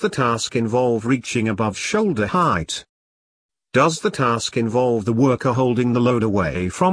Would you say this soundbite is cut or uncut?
uncut